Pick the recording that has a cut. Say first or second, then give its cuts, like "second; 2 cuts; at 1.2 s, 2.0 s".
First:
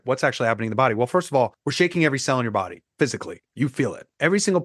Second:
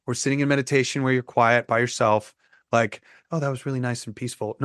first; 3 cuts; at 1.6 s, 2.8 s, 3.7 s